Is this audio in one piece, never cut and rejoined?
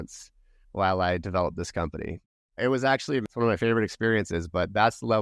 no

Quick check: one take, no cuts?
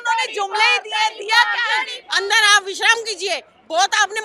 no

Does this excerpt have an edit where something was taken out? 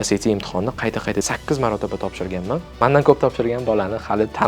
yes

